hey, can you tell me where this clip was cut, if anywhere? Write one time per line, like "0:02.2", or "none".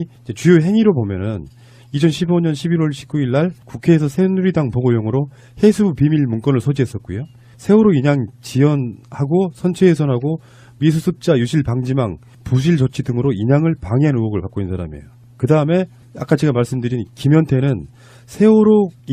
0:14.5